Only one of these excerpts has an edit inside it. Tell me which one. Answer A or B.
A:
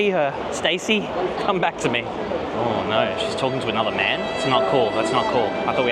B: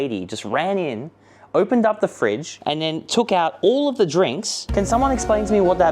B